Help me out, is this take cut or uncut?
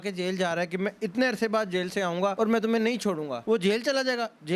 cut